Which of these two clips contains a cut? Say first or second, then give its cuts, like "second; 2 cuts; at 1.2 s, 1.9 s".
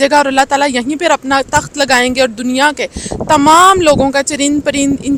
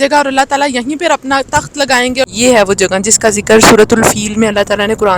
second; 1 cut; at 2.3 s